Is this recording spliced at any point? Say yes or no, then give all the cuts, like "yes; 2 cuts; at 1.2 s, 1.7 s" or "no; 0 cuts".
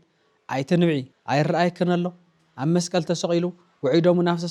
yes; 1 cut; at 1.1 s